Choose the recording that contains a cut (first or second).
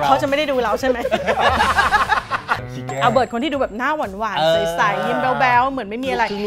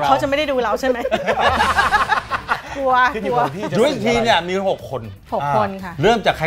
first